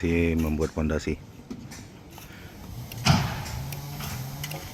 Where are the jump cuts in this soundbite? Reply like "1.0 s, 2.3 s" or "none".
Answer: none